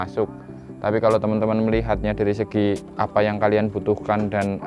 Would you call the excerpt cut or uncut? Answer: uncut